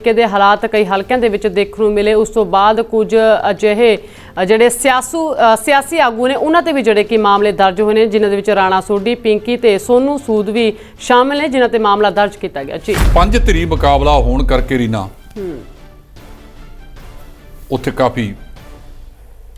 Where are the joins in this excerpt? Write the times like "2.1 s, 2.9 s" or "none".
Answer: 13.0 s